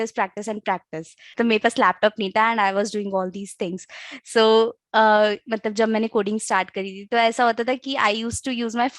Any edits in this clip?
yes; 1 cut; at 1.3 s

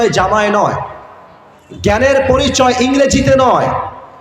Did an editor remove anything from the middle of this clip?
no; 0 cuts

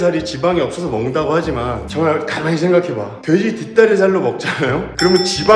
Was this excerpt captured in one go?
yes; 0 cuts

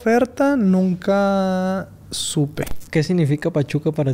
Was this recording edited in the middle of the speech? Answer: yes; 1 cut; at 2.8 s

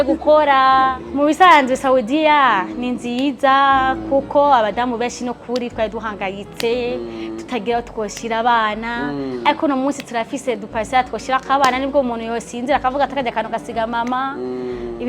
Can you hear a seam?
yes; 1 cut; at 1.0 s

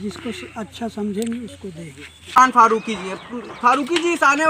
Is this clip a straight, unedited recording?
no; 1 cut; at 2.4 s

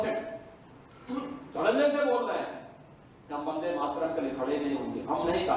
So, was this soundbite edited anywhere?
no; 0 cuts

